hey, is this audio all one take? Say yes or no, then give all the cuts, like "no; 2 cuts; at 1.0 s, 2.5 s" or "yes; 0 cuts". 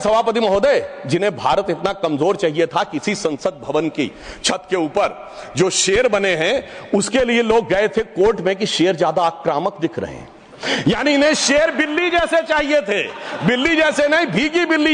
yes; 0 cuts